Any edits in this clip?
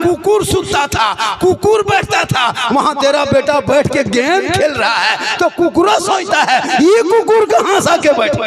no; 0 cuts

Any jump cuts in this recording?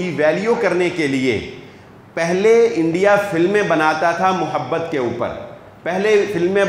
no; 0 cuts

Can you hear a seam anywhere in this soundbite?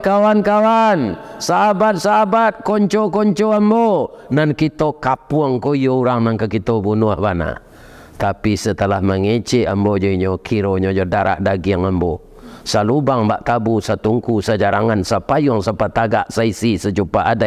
no; 0 cuts

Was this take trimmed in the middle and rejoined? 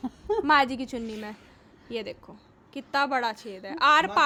no; 0 cuts

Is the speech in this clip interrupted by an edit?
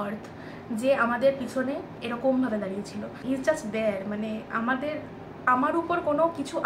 no; 0 cuts

